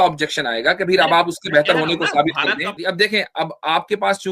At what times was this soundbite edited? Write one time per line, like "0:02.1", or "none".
0:02.8